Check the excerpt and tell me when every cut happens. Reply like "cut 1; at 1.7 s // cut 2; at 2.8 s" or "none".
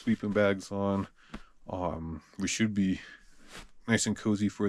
none